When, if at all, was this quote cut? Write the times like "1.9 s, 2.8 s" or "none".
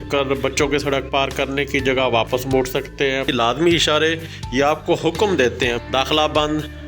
3.3 s, 5.8 s

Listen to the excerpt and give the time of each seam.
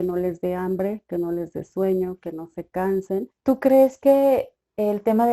3.3 s

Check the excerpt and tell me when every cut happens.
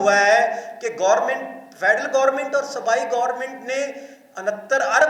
none

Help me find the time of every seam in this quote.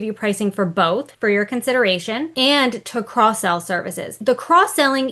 1.1 s, 2.3 s, 4.2 s

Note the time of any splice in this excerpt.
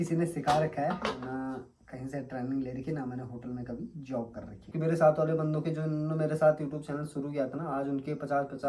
4.7 s

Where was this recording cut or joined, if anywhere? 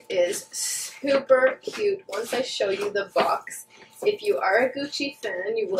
none

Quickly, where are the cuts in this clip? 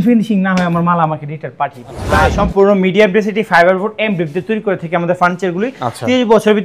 2.1 s

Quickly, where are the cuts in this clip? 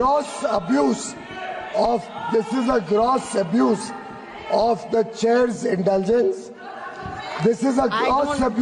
none

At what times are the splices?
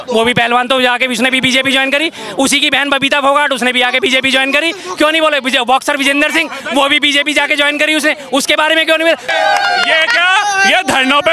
9.3 s

